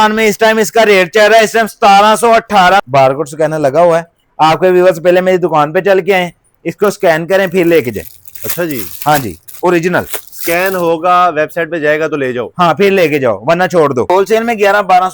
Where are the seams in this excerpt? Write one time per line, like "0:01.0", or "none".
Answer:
0:02.8
0:14.3